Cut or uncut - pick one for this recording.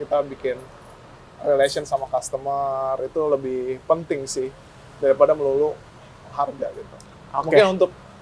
uncut